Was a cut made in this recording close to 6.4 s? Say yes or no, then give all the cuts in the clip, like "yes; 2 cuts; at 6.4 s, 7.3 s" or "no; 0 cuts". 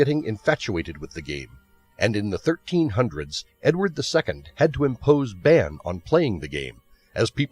yes; 1 cut; at 6.4 s